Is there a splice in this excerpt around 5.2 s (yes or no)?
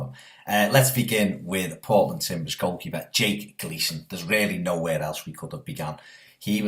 yes